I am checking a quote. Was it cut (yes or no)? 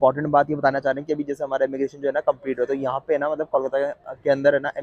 no